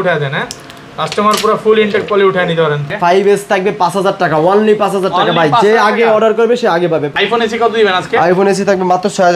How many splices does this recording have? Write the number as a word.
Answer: two